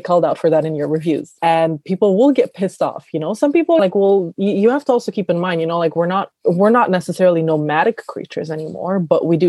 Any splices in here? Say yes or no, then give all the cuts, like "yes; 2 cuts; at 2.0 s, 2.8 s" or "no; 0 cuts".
yes; 2 cuts; at 1.4 s, 3.8 s